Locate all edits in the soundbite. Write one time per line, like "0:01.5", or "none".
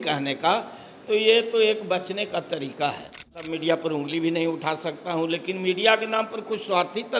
0:03.4